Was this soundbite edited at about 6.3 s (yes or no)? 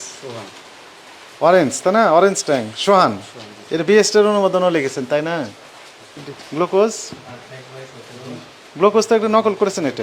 yes